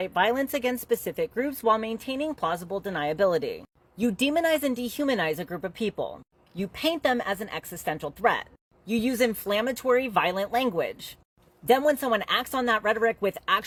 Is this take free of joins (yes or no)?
yes